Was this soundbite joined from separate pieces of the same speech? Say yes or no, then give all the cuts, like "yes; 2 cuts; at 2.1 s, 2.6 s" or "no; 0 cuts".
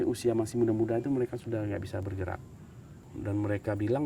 yes; 1 cut; at 3.1 s